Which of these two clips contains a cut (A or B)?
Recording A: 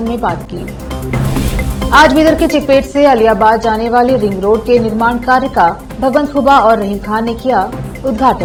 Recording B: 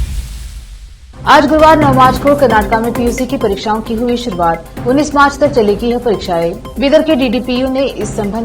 B